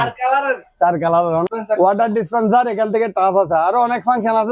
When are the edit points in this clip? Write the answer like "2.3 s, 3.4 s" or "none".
1.4 s